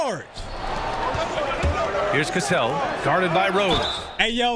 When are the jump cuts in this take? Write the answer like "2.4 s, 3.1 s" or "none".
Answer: none